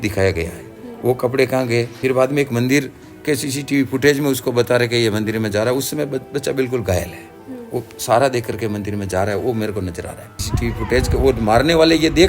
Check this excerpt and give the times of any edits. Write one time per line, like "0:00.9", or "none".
0:01.9
0:10.4